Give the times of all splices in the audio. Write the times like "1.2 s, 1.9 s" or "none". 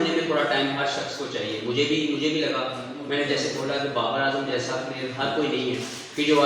none